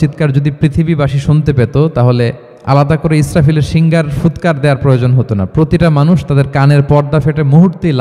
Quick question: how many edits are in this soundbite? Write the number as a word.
one